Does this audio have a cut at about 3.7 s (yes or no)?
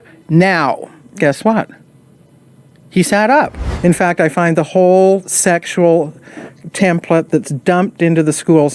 yes